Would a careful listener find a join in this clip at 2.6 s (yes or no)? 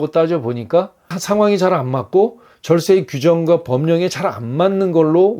no